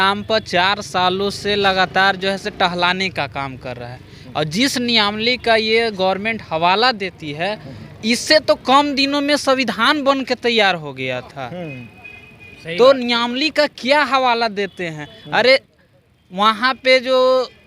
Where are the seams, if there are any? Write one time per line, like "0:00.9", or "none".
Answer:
none